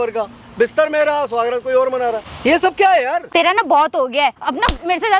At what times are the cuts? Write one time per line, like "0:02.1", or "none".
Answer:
0:02.3
0:03.2
0:04.4